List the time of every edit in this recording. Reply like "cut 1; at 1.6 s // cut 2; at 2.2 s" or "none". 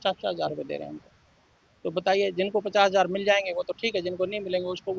none